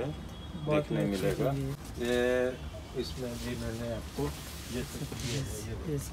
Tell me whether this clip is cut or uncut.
uncut